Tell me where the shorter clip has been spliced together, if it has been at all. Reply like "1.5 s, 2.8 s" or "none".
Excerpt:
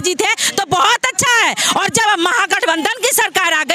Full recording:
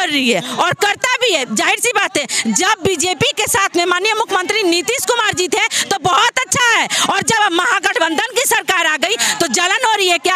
none